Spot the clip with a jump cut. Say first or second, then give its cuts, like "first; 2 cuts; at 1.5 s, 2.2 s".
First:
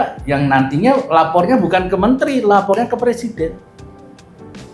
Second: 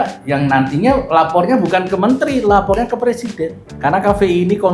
second; 1 cut; at 3.7 s